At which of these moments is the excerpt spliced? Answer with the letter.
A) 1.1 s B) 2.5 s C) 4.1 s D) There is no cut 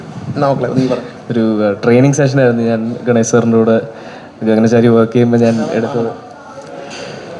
A